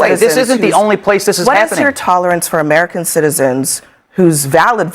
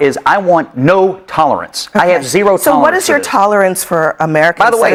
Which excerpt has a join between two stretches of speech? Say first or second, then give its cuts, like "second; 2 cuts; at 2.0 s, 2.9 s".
first; 1 cut; at 1.6 s